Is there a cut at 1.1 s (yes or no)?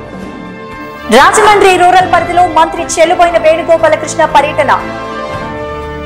yes